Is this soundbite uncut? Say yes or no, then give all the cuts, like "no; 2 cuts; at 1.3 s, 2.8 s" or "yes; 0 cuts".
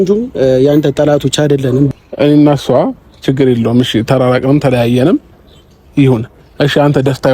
no; 1 cut; at 1.9 s